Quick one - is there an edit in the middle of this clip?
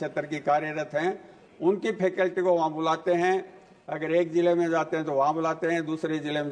no; 0 cuts

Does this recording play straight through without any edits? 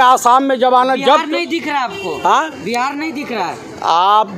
yes; 0 cuts

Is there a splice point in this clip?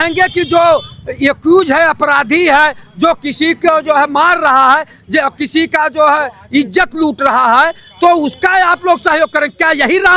no; 0 cuts

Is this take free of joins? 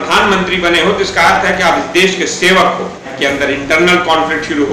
no; 1 cut; at 3.1 s

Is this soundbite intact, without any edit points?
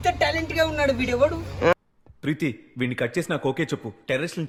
yes; 0 cuts

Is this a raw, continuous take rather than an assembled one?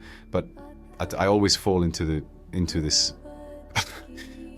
yes; 0 cuts

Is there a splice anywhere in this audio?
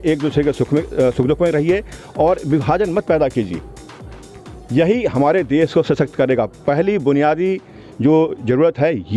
no; 0 cuts

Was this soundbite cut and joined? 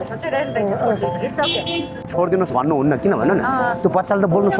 yes; 1 cut; at 2.0 s

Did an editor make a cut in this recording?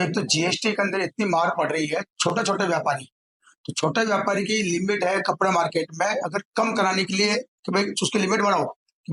no; 0 cuts

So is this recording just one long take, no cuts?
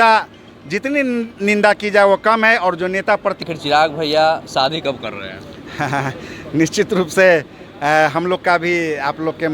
no; 1 cut; at 3.5 s

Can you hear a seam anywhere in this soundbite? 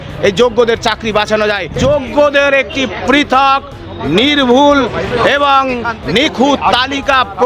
yes; 1 cut; at 1.7 s

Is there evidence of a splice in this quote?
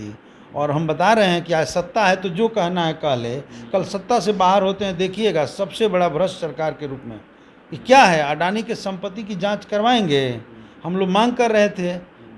no; 0 cuts

